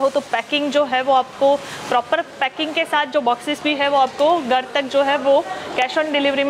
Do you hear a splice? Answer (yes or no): no